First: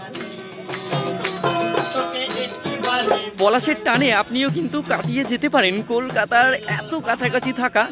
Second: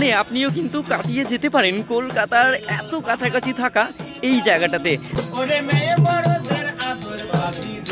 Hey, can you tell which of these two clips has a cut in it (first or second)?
second